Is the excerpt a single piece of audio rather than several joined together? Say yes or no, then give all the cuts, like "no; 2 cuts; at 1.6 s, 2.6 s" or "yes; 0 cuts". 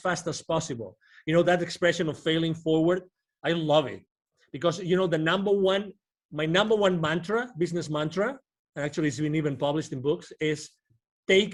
yes; 0 cuts